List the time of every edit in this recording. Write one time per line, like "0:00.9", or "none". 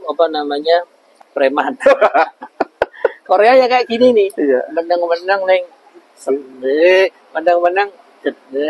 0:01.0

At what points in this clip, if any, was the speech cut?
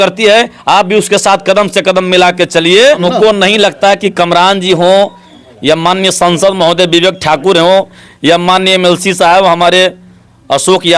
0:03.0

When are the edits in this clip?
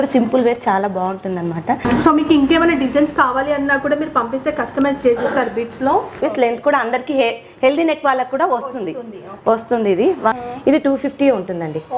0:01.9
0:06.2
0:10.4

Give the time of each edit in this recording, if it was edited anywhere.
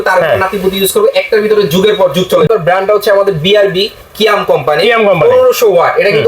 0:02.5

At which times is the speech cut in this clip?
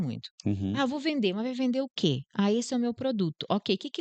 none

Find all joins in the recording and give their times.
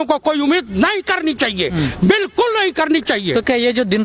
none

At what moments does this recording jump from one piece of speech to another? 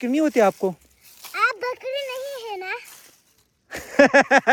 none

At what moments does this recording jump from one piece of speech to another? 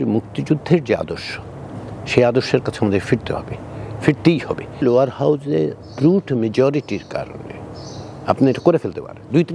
0:04.8

